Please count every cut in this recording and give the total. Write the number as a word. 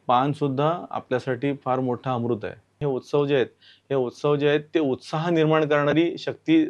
one